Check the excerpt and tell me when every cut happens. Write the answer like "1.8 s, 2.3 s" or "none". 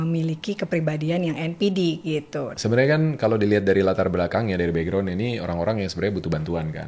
2.5 s